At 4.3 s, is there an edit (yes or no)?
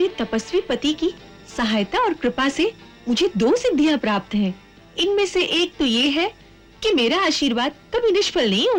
no